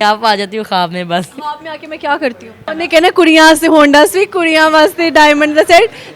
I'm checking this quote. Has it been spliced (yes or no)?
yes